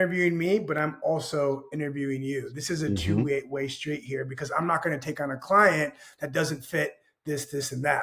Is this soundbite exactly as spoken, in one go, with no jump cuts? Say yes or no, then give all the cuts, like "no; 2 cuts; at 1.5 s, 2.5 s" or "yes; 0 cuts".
yes; 0 cuts